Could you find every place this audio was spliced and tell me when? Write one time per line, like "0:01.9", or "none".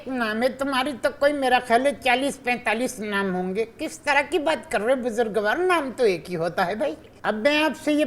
0:07.1